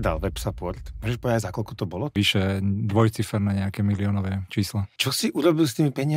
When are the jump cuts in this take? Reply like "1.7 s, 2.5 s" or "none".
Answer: 0.9 s, 2.1 s, 4.9 s

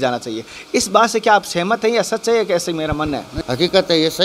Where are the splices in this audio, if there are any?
3.3 s

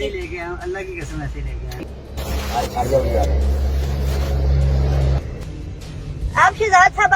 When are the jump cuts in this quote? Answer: 1.8 s, 5.4 s

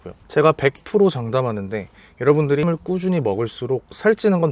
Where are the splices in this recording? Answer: 2.6 s

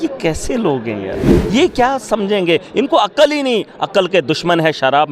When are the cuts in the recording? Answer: 1.4 s

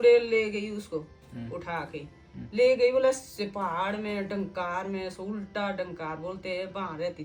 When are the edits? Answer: none

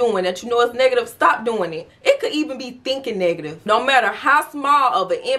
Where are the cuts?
1.9 s, 3.6 s

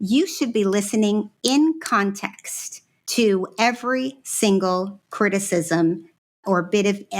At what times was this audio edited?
none

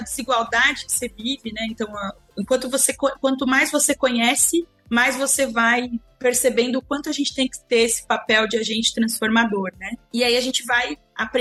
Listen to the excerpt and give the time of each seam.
none

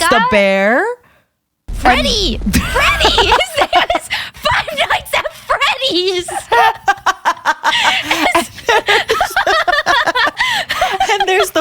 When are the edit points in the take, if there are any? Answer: 10.4 s

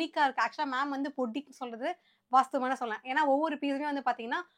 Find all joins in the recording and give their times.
none

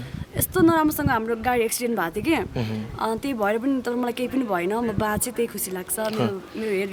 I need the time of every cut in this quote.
none

